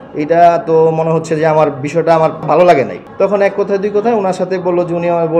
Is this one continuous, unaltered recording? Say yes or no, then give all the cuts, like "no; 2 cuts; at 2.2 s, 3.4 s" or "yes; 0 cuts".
no; 1 cut; at 2.4 s